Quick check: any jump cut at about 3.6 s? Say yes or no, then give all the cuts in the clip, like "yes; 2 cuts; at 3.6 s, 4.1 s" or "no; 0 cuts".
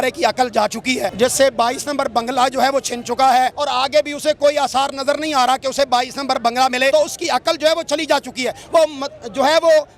yes; 3 cuts; at 1.1 s, 3.6 s, 6.9 s